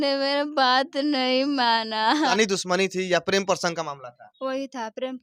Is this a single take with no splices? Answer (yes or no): no